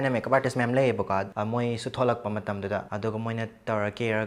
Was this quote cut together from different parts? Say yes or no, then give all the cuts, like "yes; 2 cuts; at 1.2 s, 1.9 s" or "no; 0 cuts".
yes; 2 cuts; at 1.3 s, 2.9 s